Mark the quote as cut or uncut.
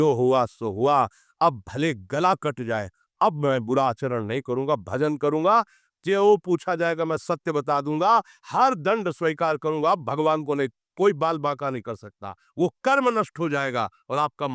uncut